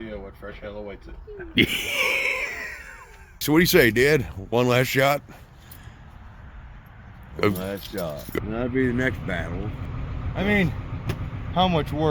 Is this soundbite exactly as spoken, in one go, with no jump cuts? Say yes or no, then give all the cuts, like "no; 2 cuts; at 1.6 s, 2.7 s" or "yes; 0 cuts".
no; 3 cuts; at 3.4 s, 8.4 s, 9.8 s